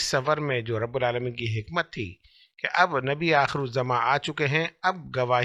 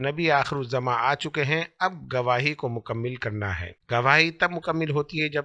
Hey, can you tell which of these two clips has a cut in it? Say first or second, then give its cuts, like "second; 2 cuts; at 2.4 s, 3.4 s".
second; 1 cut; at 3.7 s